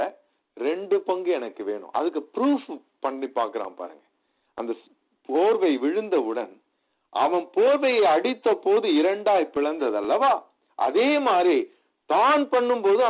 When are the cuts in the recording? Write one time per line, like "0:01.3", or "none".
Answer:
none